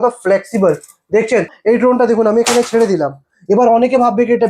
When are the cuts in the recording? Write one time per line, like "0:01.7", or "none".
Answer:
0:01.5